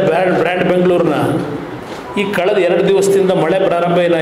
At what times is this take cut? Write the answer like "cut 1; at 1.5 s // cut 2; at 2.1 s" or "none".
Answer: none

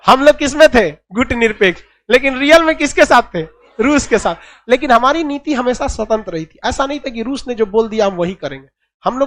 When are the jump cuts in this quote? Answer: none

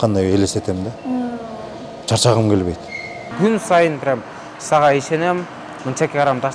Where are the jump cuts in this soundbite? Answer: cut 1; at 3.2 s

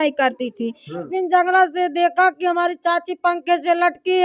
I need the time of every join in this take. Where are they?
cut 1; at 1.1 s

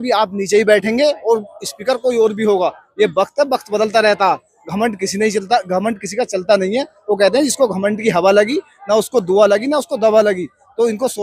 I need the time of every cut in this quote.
none

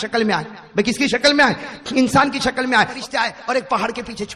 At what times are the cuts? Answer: cut 1; at 2.9 s

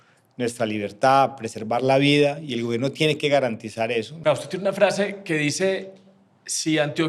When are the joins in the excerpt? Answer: cut 1; at 4.1 s

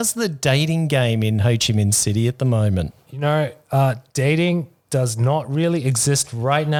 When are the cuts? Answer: none

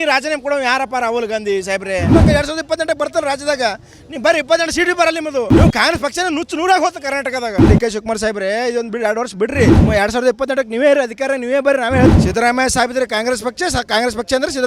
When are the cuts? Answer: cut 1; at 2.1 s // cut 2; at 5.5 s // cut 3; at 7.6 s // cut 4; at 9.8 s // cut 5; at 12.1 s

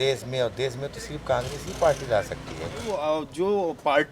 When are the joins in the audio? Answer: cut 1; at 2.9 s

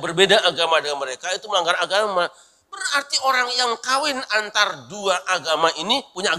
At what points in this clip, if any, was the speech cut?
none

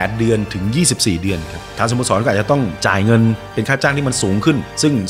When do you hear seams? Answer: cut 1; at 1.6 s

